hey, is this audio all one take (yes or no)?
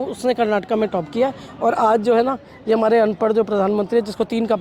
yes